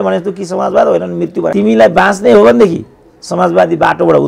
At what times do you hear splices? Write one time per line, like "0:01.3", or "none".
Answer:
0:01.5